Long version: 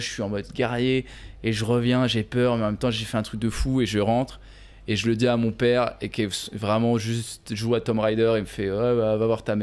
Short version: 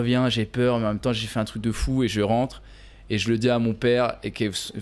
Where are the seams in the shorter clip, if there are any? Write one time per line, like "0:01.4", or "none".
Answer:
none